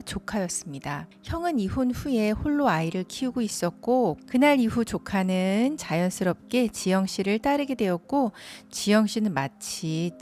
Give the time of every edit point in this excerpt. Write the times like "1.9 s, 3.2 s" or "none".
4.2 s

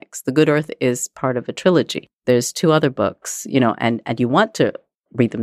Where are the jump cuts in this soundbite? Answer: 2.0 s

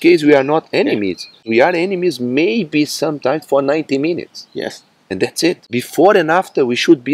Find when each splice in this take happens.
1.4 s, 5.6 s

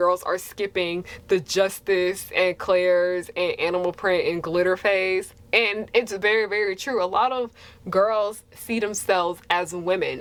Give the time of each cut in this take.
none

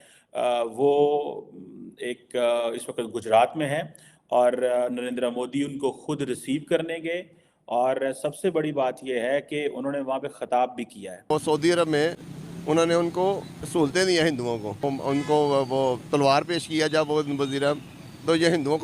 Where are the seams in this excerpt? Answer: 11.3 s, 14.8 s

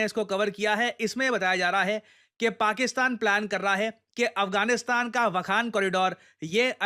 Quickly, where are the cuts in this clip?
none

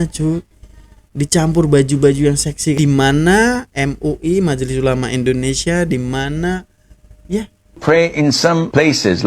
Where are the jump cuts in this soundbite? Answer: 2.8 s, 7.8 s

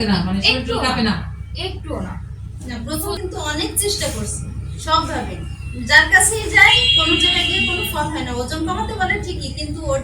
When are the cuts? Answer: 3.2 s

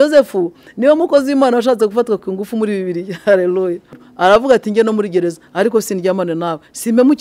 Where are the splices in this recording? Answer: 4.0 s

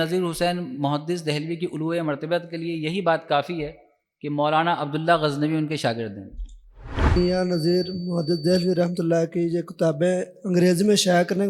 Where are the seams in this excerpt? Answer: 7.2 s

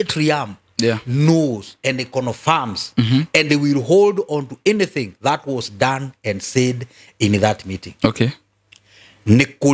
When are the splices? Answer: none

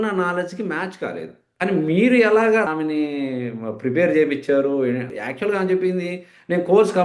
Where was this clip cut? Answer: 1.4 s, 2.7 s, 5.1 s

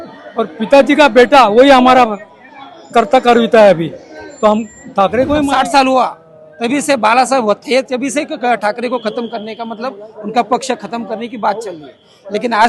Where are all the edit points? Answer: 5.5 s

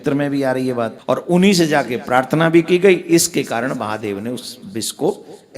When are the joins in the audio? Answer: 1.0 s

